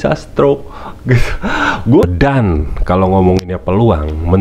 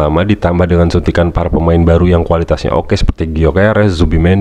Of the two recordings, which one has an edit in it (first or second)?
first